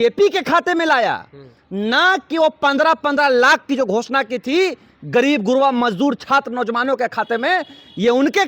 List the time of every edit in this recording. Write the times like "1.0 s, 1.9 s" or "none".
none

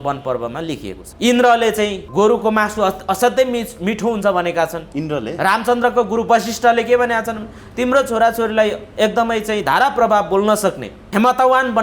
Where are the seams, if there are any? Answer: 1.0 s, 2.0 s, 4.8 s, 10.9 s

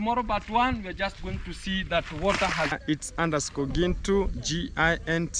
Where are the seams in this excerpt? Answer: 2.8 s

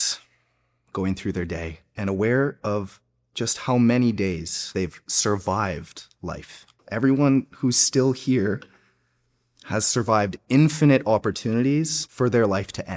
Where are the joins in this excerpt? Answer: 1.8 s, 4.7 s, 6.8 s, 12.0 s

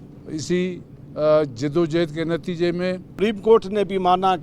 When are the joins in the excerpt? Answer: 3.1 s

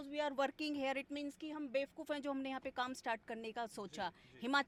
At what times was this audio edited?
none

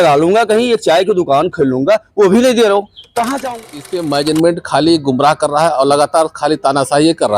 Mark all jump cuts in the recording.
3.6 s

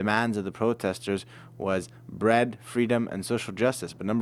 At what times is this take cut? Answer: none

